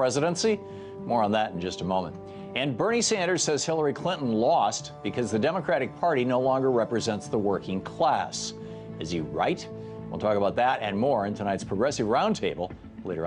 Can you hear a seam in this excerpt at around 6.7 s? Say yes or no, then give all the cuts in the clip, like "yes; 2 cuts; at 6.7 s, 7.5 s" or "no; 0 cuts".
no; 1 cut; at 2.5 s